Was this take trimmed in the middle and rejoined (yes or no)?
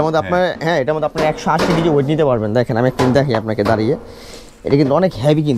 no